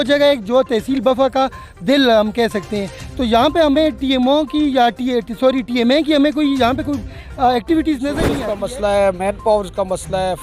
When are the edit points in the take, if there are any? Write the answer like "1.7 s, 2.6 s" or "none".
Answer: 8.3 s